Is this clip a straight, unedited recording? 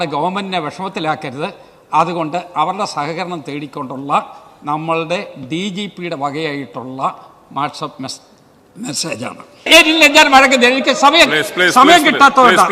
no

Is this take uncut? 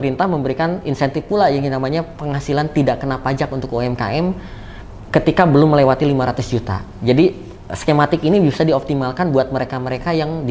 yes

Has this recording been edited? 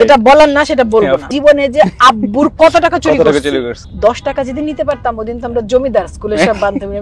yes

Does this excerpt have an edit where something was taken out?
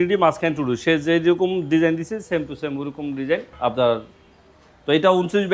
yes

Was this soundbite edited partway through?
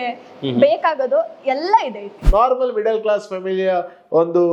yes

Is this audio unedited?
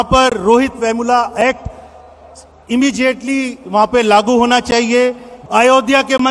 no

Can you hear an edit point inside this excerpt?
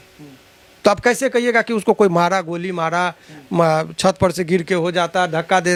no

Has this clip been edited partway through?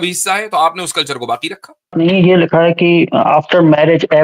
yes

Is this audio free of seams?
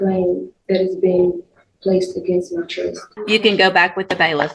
no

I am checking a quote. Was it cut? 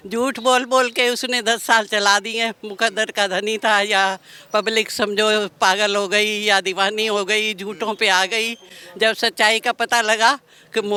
no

